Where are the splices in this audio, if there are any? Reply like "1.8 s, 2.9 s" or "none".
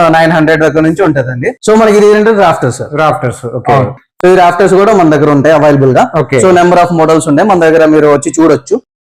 1.5 s